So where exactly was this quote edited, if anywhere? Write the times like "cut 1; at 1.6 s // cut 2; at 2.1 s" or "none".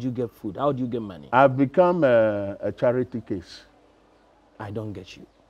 none

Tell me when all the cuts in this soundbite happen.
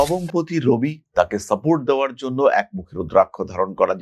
none

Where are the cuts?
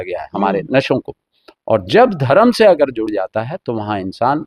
none

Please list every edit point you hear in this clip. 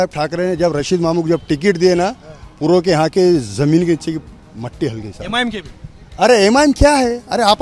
none

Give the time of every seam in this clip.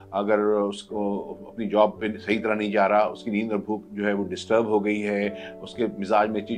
none

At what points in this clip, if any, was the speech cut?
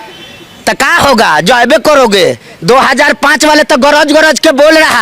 cut 1; at 2.5 s

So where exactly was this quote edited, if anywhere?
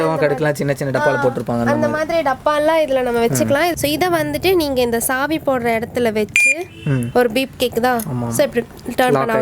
cut 1; at 3.7 s

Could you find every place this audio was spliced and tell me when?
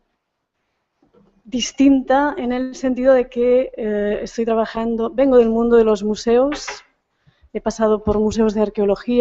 cut 1; at 2.2 s

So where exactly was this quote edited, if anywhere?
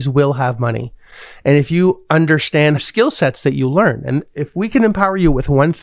cut 1; at 2.8 s

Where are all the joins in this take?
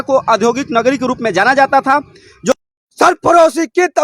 cut 1; at 2.5 s

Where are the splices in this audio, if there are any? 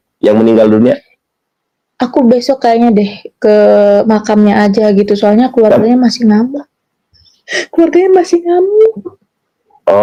none

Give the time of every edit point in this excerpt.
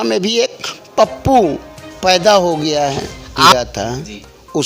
cut 1; at 3.5 s

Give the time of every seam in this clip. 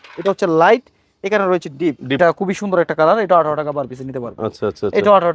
cut 1; at 2.2 s

